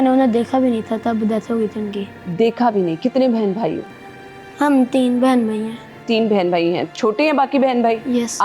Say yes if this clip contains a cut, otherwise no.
no